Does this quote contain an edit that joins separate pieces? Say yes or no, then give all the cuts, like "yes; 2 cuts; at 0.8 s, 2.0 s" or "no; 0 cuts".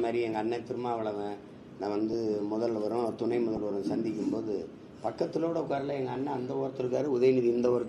no; 0 cuts